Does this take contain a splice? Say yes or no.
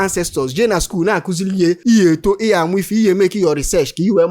yes